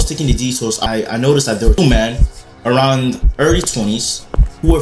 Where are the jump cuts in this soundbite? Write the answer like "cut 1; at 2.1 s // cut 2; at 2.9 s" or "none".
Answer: cut 1; at 0.8 s // cut 2; at 1.8 s